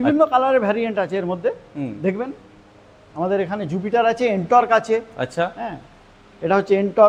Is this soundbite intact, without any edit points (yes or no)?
yes